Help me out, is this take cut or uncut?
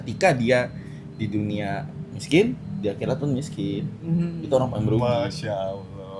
uncut